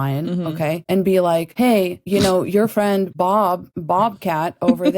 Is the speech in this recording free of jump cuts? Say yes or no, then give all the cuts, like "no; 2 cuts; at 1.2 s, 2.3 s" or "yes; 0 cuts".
no; 3 cuts; at 0.8 s, 1.9 s, 3.3 s